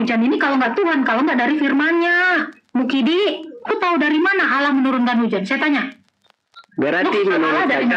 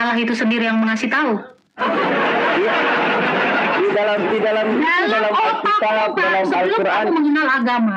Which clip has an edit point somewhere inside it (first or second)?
first